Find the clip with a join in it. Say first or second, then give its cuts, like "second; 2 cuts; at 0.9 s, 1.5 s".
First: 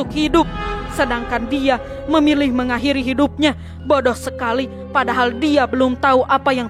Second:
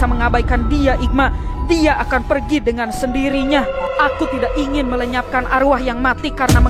second; 1 cut; at 3.8 s